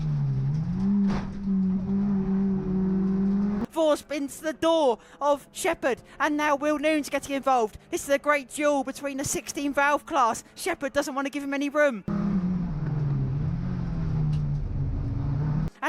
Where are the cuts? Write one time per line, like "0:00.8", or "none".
0:03.7
0:12.1